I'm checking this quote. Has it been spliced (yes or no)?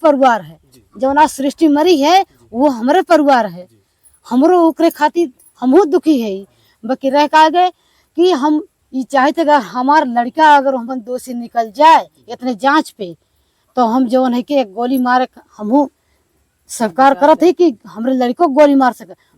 no